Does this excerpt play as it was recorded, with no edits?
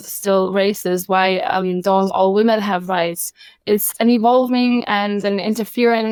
yes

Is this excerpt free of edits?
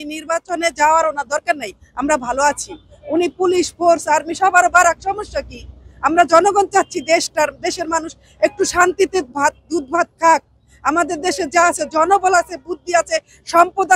yes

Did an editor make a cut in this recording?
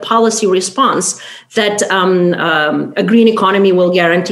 no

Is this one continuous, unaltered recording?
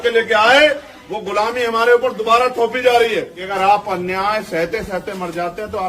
no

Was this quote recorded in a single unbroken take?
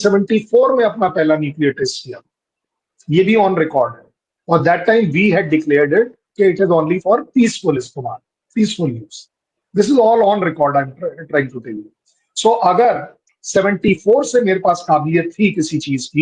yes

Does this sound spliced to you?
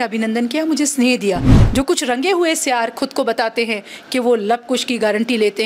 yes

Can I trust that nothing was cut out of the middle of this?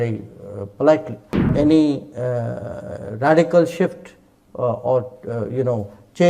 no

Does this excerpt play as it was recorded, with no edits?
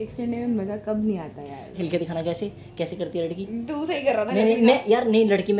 no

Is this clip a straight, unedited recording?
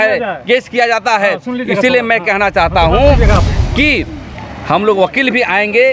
no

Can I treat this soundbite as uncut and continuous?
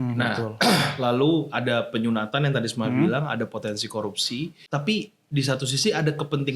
no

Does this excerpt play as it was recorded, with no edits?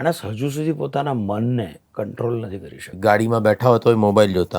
no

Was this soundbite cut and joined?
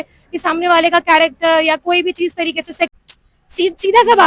yes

